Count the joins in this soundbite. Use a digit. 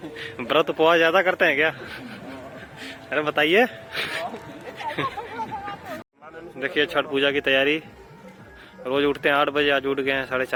0